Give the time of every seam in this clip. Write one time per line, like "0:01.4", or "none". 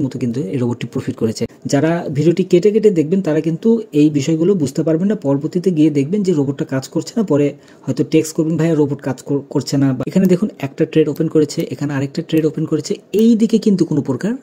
0:01.5
0:10.0